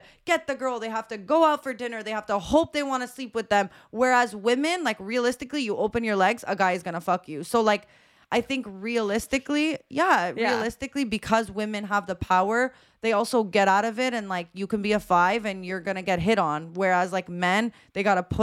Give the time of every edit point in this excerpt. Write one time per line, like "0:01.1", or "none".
none